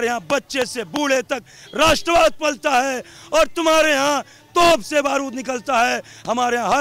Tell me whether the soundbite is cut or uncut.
uncut